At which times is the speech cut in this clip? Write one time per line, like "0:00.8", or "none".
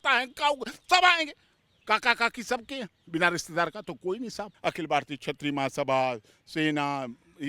0:04.5